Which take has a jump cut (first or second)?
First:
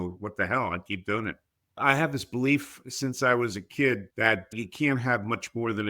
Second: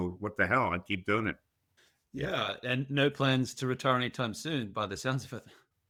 first